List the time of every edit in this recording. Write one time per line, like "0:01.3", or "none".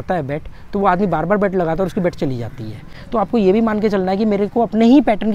none